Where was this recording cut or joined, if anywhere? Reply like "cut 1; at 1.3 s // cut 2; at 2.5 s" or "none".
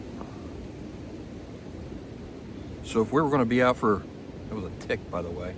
none

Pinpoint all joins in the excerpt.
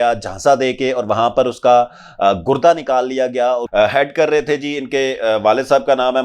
cut 1; at 3.7 s

